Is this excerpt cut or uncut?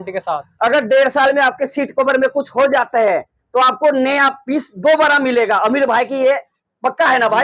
uncut